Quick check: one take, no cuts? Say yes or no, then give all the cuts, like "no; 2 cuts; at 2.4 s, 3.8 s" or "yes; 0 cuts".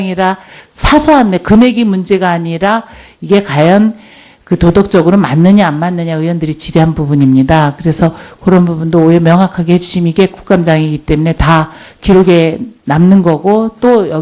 no; 1 cut; at 1.6 s